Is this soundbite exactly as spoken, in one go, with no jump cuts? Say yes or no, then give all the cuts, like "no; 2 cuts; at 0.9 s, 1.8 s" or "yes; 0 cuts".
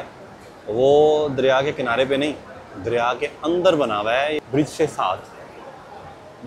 yes; 0 cuts